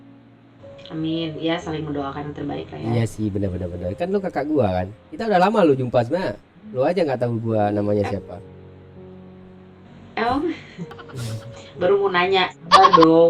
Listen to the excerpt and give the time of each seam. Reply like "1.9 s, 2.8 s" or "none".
none

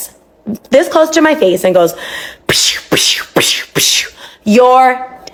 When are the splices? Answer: none

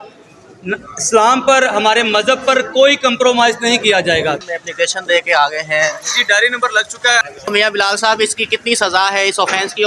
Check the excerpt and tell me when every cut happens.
4.4 s, 7.3 s

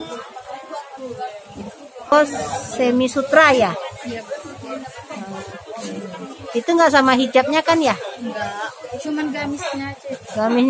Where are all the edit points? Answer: 2.1 s

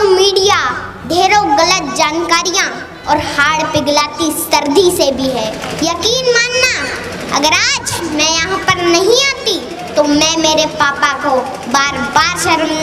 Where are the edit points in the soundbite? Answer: 5.6 s

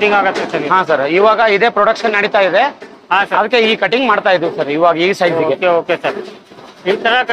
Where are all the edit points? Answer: none

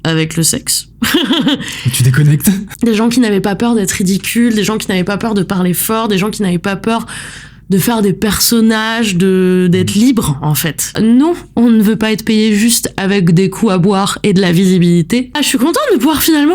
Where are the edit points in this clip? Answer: 2.7 s, 10.9 s, 15.3 s

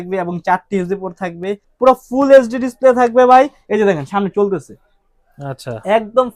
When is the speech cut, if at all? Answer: 1.6 s

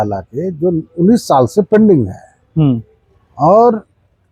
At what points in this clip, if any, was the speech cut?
none

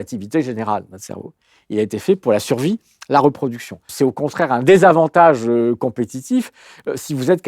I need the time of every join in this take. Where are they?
3.8 s

